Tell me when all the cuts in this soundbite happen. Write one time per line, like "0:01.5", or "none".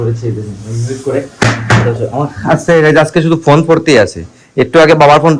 none